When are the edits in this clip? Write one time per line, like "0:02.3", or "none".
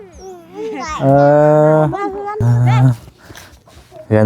0:02.4